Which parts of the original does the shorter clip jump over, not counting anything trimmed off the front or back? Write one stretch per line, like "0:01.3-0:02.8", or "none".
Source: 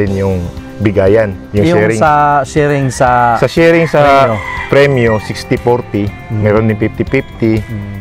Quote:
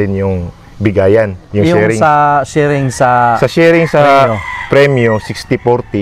none